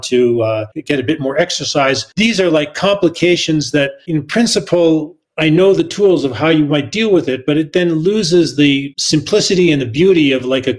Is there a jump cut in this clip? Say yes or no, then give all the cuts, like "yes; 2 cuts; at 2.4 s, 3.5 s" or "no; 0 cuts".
no; 0 cuts